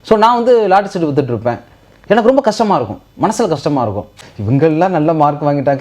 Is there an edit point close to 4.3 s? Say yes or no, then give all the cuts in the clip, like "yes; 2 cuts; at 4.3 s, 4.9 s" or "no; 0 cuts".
yes; 1 cut; at 4.3 s